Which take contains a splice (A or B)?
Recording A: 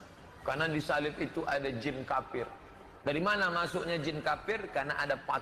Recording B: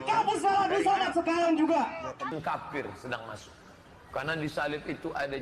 B